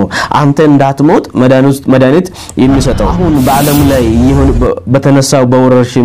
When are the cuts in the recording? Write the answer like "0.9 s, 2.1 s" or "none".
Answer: 3.1 s